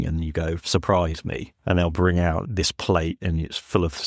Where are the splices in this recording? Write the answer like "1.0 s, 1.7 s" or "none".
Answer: 1.5 s